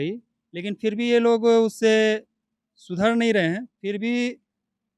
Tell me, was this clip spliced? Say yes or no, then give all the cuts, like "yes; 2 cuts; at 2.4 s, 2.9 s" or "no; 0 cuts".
no; 0 cuts